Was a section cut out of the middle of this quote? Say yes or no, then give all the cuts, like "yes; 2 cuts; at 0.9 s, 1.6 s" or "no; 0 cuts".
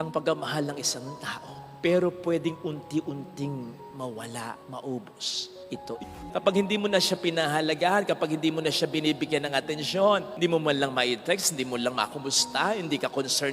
yes; 1 cut; at 6.1 s